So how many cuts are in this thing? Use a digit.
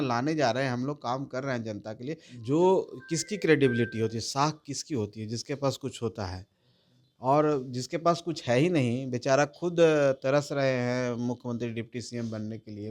1